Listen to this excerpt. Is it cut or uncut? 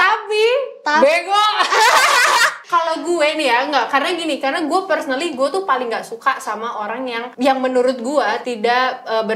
cut